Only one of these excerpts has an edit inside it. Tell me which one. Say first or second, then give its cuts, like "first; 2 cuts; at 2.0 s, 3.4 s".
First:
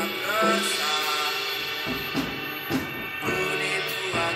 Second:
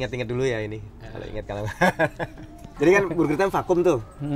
second; 1 cut; at 2.7 s